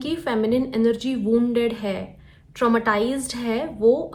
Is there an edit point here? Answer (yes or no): no